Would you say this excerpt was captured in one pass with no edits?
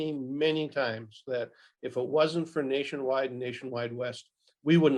yes; 0 cuts

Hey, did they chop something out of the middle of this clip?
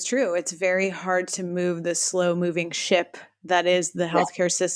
no; 0 cuts

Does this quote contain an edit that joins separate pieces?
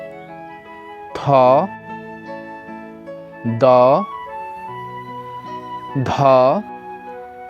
yes; 6 cuts; at 1.0 s, 1.7 s, 3.3 s, 4.4 s, 5.9 s, 6.7 s

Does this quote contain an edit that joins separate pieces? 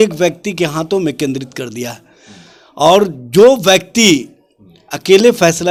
no; 0 cuts

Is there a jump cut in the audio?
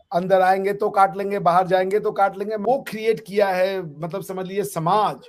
yes; 1 cut; at 2.6 s

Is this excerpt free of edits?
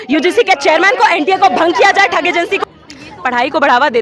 no; 1 cut; at 2.6 s

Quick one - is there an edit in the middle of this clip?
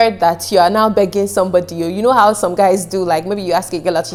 no; 0 cuts

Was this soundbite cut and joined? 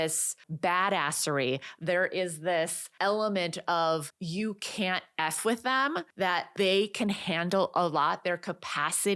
yes; 3 cuts; at 2.8 s, 4.2 s, 6.4 s

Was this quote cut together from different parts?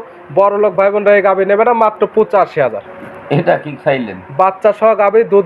no; 0 cuts

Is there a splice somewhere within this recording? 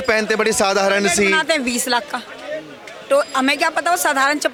no; 0 cuts

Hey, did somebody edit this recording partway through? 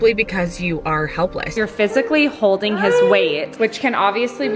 yes; 2 cuts; at 1.5 s, 3.5 s

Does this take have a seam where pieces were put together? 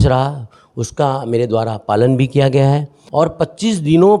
yes; 1 cut; at 2.9 s

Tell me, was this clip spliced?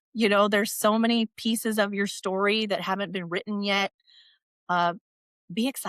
no; 0 cuts

